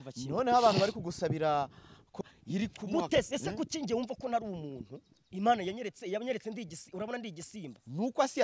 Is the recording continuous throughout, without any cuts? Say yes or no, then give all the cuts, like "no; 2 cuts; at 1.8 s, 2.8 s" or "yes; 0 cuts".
no; 1 cut; at 2.2 s